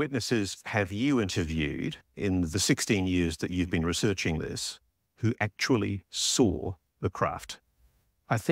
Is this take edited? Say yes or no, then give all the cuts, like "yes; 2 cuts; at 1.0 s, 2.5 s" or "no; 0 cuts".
no; 0 cuts